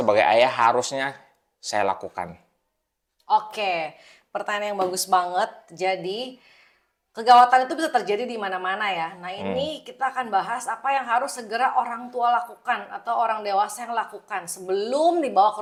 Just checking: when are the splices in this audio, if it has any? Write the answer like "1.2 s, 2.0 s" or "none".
none